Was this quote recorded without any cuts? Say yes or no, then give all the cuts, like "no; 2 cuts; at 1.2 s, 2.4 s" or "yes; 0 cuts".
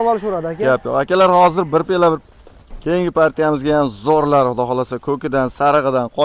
no; 1 cut; at 2.2 s